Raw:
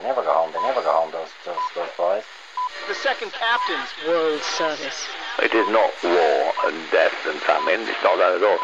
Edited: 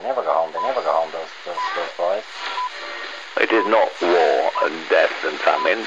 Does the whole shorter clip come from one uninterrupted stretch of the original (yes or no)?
no